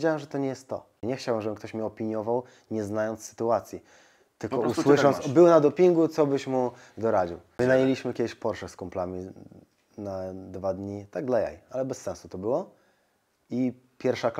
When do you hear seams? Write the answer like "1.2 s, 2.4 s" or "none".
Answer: 1.0 s, 7.5 s